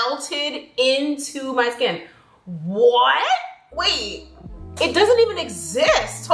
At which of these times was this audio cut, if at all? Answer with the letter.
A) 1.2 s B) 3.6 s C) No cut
C